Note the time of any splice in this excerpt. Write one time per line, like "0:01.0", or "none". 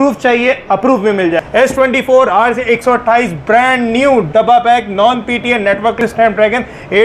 0:01.4
0:06.0